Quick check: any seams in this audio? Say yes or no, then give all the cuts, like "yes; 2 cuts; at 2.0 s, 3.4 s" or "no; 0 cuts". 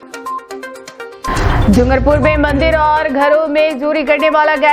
no; 0 cuts